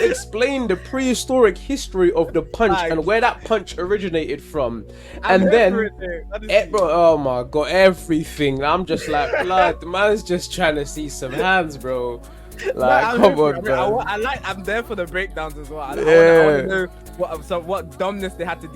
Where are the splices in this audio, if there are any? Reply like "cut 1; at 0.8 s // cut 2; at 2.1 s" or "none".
none

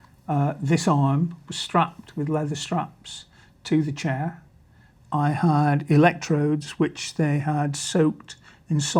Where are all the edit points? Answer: none

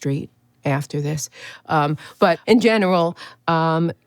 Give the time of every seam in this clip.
cut 1; at 2.4 s

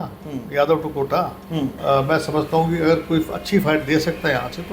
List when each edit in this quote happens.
cut 1; at 1.8 s

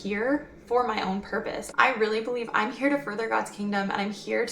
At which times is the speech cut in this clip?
cut 1; at 1.6 s

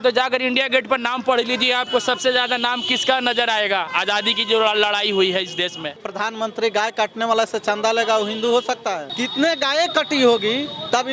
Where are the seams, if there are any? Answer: cut 1; at 6.0 s // cut 2; at 9.1 s

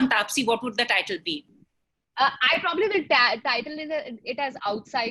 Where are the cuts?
cut 1; at 1.6 s

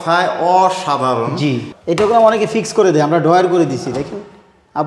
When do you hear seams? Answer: cut 1; at 1.7 s

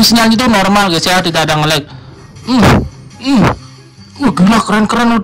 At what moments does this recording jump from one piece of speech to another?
none

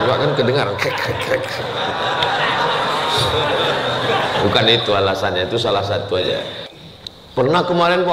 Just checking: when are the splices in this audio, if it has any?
cut 1; at 6.6 s

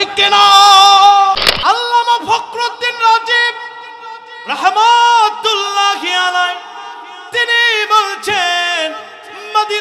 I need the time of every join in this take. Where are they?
cut 1; at 1.5 s

